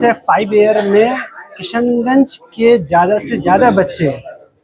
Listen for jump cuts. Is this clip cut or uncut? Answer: uncut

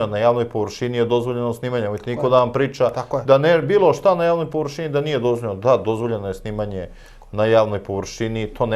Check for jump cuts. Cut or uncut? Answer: uncut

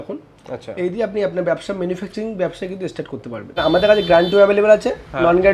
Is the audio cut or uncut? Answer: cut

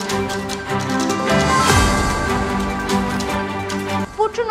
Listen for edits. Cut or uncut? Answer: uncut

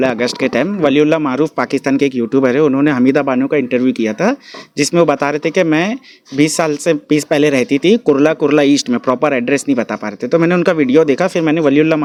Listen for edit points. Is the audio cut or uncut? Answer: uncut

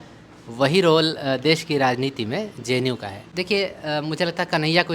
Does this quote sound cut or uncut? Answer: cut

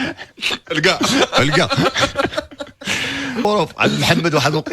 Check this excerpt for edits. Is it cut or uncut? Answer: cut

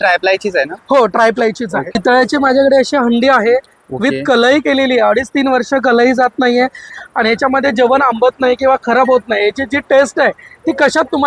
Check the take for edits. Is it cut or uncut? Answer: cut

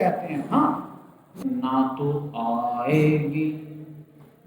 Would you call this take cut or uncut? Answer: cut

